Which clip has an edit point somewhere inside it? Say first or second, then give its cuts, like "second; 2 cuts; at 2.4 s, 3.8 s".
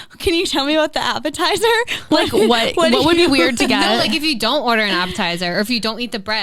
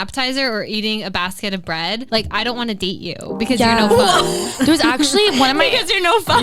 second; 1 cut; at 2.0 s